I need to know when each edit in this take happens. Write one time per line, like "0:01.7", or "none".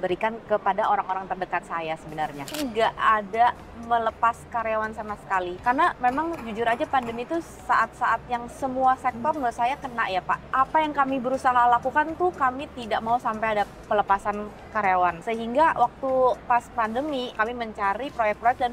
0:02.5